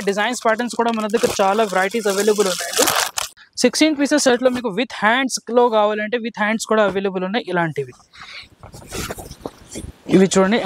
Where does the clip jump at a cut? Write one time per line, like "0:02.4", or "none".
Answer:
0:03.3